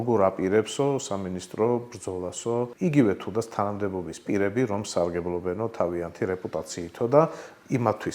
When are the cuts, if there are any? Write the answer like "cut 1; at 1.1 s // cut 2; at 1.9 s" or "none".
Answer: cut 1; at 2.7 s